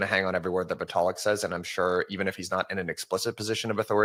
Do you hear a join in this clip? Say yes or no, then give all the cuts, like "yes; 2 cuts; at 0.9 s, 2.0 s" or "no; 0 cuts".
no; 0 cuts